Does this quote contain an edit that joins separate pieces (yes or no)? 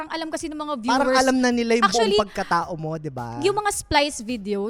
no